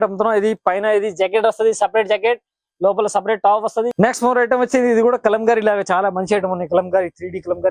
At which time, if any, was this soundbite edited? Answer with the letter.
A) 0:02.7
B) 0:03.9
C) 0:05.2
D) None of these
B